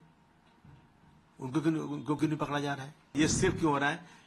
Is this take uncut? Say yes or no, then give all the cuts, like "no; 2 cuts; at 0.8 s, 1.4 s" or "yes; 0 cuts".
no; 1 cut; at 3.1 s